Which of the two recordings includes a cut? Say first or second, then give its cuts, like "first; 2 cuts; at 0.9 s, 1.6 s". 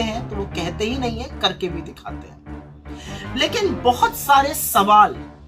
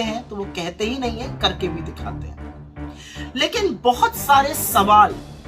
second; 2 cuts; at 1.7 s, 3.1 s